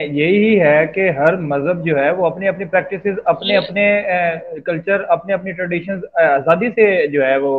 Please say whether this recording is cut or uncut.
uncut